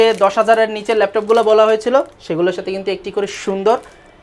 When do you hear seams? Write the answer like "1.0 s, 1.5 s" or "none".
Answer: none